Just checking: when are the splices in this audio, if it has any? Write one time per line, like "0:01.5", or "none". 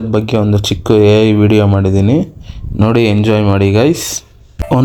none